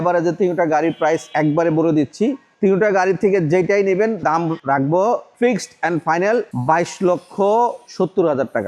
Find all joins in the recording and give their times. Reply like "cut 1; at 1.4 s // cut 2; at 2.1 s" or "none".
cut 1; at 1.3 s // cut 2; at 2.5 s // cut 3; at 4.2 s // cut 4; at 5.3 s // cut 5; at 6.5 s // cut 6; at 7.8 s